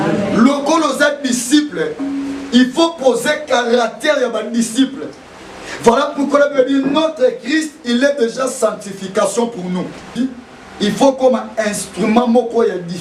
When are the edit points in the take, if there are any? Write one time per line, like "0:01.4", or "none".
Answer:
0:10.1